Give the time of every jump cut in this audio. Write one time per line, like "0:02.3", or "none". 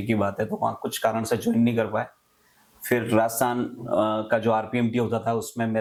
none